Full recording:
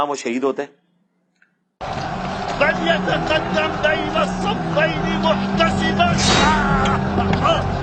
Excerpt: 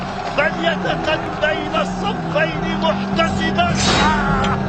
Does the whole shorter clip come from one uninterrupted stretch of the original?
no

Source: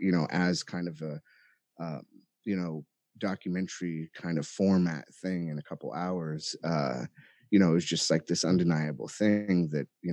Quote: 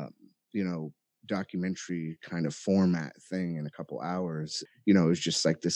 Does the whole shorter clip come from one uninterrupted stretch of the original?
no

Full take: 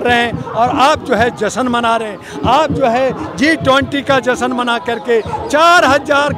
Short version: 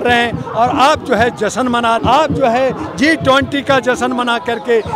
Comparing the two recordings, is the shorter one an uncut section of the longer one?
no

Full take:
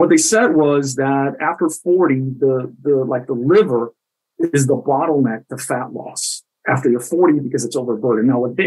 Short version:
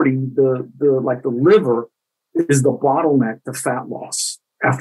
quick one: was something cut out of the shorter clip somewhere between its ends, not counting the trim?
no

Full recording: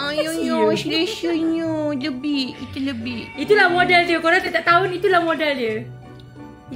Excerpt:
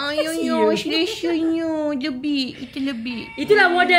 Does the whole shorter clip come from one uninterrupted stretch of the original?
yes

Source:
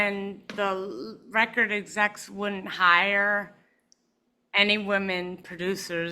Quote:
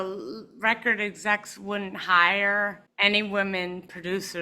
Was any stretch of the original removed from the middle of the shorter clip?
yes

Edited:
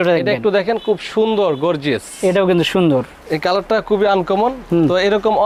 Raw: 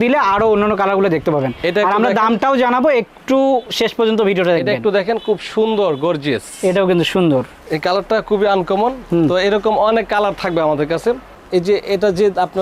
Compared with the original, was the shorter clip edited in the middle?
no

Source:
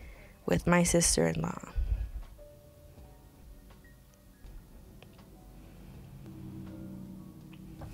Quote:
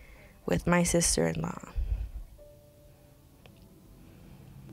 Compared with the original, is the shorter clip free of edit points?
no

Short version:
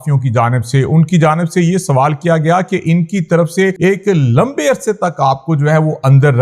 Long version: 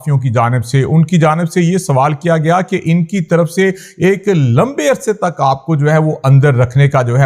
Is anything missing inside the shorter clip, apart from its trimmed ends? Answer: yes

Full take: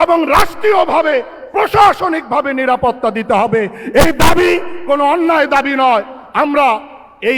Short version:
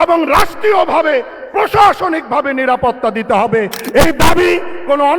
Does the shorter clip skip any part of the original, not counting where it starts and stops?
no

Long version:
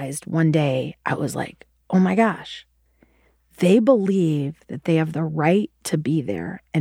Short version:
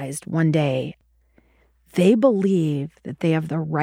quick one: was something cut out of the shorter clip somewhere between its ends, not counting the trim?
yes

